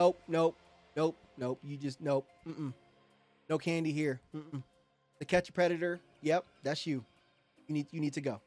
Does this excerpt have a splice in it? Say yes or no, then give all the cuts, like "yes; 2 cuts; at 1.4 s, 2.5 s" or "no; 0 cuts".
no; 0 cuts